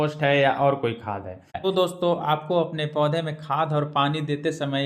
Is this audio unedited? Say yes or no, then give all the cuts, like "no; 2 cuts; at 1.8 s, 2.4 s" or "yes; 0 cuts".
no; 1 cut; at 1.6 s